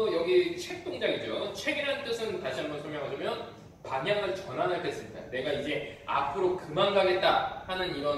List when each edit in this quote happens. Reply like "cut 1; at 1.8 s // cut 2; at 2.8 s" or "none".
cut 1; at 3.2 s